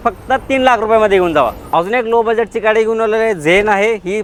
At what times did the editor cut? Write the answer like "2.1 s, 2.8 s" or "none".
none